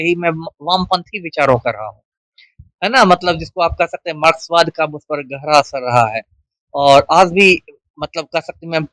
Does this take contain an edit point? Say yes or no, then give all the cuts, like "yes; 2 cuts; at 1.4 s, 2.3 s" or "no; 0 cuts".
no; 0 cuts